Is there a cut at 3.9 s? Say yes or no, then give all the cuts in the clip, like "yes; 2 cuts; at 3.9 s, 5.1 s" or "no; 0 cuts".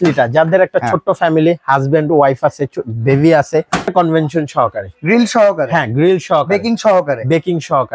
yes; 1 cut; at 3.9 s